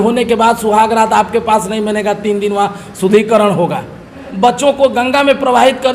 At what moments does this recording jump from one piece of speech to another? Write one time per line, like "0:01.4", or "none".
0:04.2

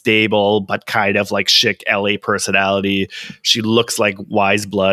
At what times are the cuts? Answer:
none

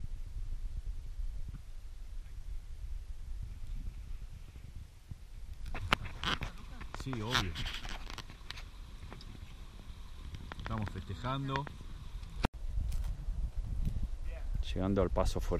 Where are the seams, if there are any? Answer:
0:05.9

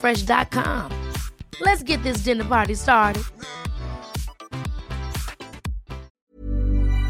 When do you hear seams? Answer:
0:06.1

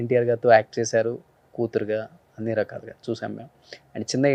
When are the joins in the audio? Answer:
none

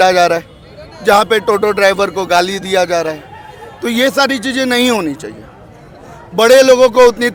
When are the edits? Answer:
none

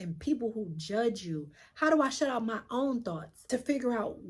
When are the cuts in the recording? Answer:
0:03.3

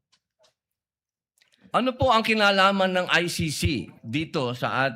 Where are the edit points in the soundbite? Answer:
none

